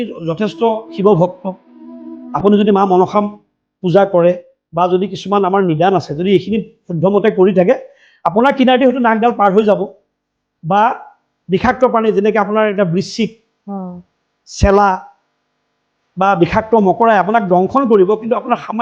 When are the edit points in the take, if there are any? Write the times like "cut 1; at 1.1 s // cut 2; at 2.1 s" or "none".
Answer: none

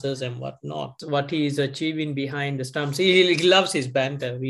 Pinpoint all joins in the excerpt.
cut 1; at 1.0 s

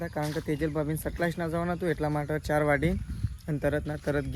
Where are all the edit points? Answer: none

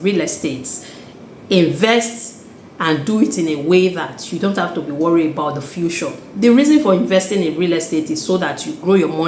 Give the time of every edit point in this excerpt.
none

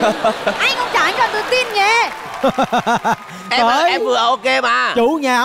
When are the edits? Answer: none

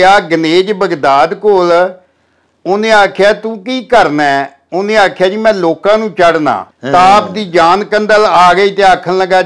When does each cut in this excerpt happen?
cut 1; at 6.7 s

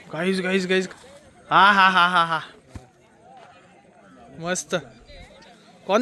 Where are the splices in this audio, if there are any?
cut 1; at 0.9 s

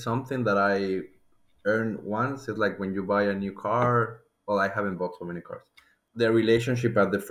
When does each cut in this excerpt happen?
cut 1; at 6.0 s

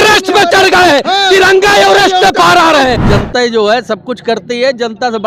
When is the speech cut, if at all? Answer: cut 1; at 3.0 s

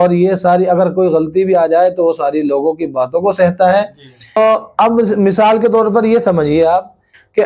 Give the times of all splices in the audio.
cut 1; at 4.4 s

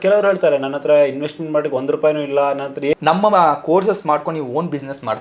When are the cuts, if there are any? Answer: cut 1; at 2.9 s

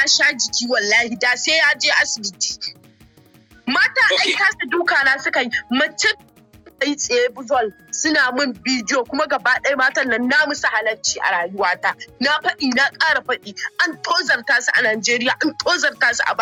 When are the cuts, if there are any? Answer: none

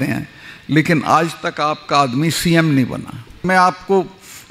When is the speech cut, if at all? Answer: cut 1; at 3.4 s

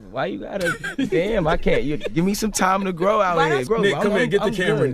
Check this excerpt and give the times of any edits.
cut 1; at 3.6 s

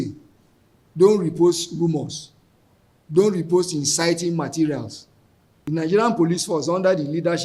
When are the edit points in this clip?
cut 1; at 5.7 s

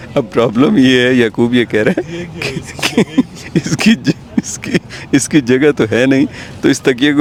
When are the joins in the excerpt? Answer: none

